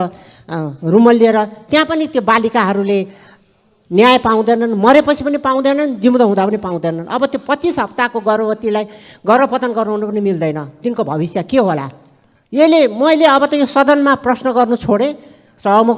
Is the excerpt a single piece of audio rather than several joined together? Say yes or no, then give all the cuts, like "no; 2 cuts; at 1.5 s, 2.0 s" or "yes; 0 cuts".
yes; 0 cuts